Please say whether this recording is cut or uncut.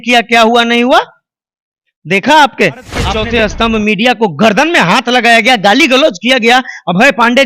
cut